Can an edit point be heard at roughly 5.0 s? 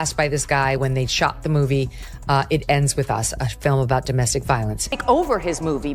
yes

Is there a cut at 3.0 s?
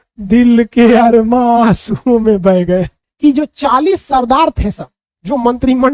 yes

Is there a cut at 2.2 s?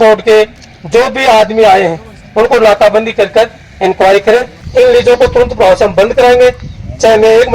no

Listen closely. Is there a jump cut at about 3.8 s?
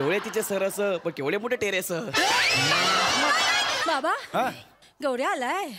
yes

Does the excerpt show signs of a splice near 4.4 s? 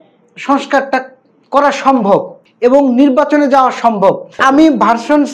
yes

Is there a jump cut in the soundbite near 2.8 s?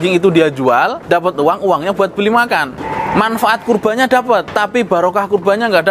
yes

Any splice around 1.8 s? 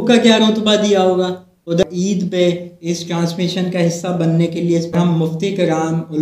yes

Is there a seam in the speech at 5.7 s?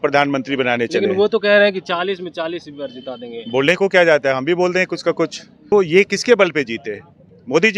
yes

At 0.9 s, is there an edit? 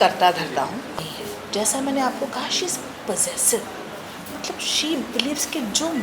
yes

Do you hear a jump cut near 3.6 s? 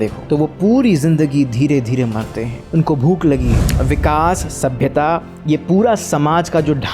yes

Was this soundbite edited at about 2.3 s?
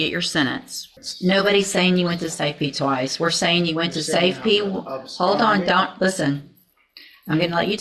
no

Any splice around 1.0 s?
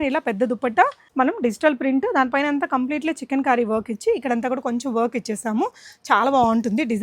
yes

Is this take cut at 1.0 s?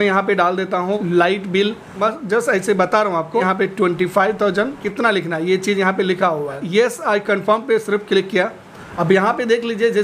yes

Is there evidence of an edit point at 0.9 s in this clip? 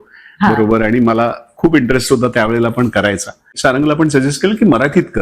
no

